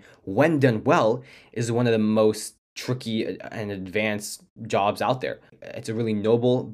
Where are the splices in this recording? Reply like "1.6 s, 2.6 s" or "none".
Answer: 5.6 s